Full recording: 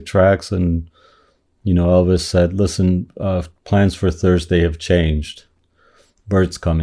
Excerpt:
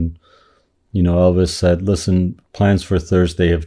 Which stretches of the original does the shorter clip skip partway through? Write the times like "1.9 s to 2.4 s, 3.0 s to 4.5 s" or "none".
3.1 s to 3.5 s